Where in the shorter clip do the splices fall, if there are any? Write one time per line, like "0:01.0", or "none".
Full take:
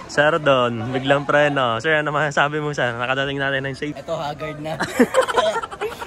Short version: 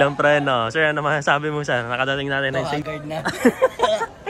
0:02.5